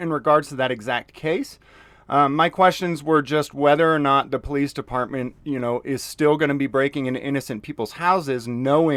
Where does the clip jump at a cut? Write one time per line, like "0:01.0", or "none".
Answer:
none